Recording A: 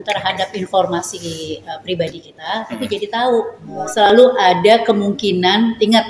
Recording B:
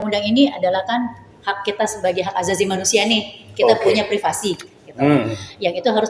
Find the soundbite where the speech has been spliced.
A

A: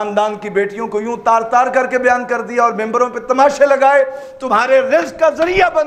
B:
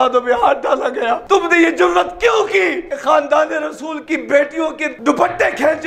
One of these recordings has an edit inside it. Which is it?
B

